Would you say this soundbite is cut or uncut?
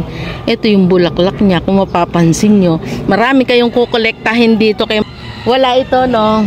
cut